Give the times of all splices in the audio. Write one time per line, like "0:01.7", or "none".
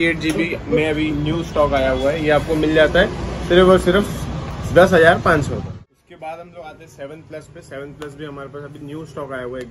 none